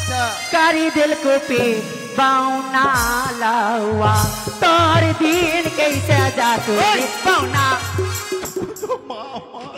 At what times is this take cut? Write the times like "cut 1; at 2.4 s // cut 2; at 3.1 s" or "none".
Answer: none